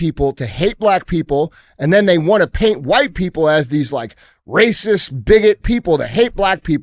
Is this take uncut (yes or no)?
yes